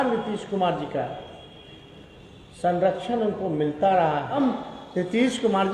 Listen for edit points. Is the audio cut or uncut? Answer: cut